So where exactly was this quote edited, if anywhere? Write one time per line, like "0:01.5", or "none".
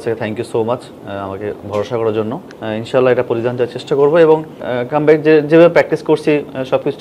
0:02.5
0:04.7